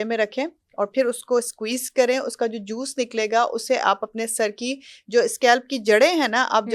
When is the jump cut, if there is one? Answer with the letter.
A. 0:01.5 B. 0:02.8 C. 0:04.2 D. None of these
D